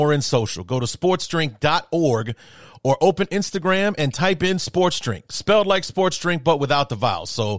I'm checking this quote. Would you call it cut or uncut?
uncut